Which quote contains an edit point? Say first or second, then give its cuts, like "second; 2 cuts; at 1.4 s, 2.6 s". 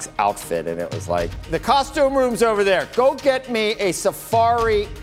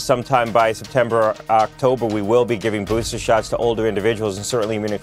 first; 1 cut; at 1.7 s